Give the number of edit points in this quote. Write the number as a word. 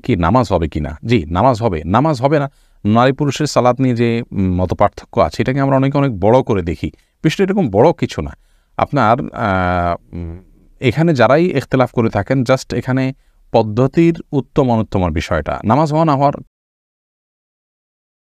zero